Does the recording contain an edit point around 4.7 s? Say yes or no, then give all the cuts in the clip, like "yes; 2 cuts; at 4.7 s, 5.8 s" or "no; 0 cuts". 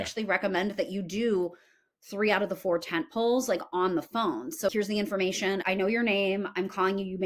yes; 1 cut; at 4.7 s